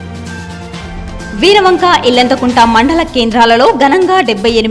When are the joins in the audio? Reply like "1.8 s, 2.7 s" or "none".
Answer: 0.9 s